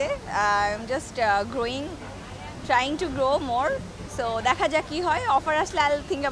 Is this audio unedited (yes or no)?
yes